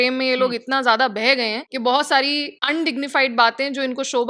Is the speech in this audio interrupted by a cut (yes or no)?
yes